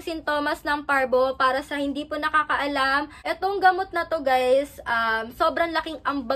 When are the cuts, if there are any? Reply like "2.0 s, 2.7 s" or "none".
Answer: 3.1 s